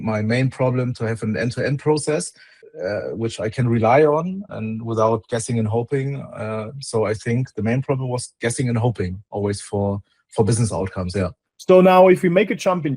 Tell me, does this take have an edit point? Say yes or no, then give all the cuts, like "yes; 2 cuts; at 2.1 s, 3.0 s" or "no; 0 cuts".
yes; 2 cuts; at 4.5 s, 11.5 s